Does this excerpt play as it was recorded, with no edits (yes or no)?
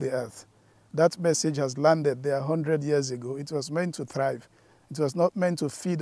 yes